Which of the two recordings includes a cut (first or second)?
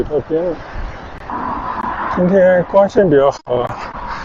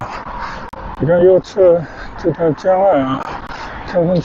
first